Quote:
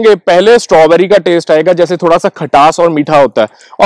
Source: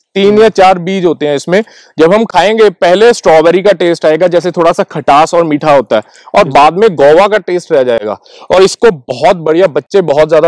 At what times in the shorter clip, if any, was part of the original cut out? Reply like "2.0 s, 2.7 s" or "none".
none